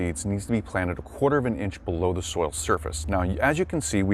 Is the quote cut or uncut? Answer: uncut